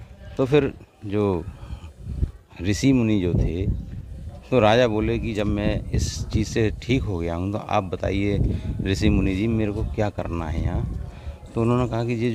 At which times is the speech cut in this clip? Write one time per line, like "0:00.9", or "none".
none